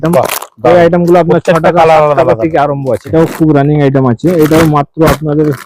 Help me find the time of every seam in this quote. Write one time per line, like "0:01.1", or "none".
0:03.1